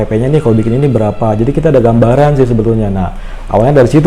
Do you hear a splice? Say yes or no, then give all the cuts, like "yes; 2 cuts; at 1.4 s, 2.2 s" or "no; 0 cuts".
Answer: no; 0 cuts